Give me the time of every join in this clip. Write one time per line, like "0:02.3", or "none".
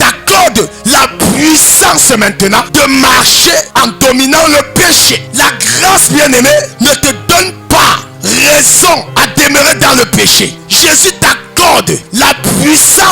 0:02.7
0:03.7
0:05.2
0:06.7
0:08.1
0:09.1
0:10.6
0:12.0